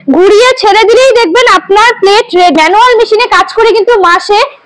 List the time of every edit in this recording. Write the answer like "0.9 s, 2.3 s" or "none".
2.6 s